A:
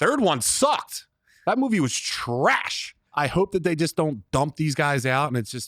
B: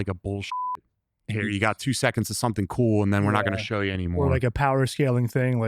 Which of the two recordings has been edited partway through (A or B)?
A